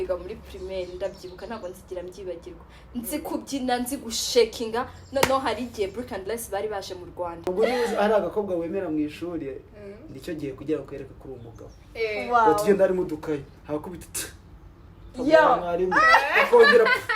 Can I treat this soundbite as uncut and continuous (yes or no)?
no